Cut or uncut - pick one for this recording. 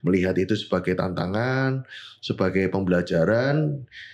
uncut